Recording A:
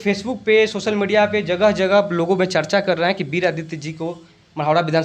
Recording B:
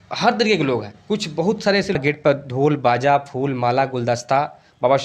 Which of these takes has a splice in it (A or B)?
B